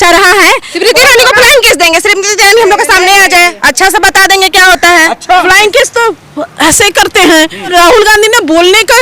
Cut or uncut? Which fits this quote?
cut